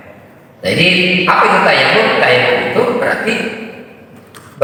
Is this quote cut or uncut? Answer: uncut